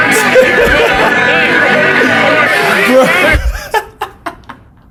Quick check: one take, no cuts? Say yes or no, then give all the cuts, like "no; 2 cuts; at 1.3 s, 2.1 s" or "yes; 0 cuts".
yes; 0 cuts